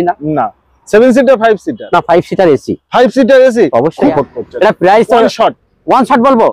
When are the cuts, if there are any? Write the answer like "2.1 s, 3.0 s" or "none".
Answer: 4.1 s